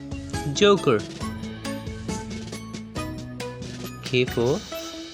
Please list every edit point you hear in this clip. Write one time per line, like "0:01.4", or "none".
0:01.0
0:03.1
0:04.0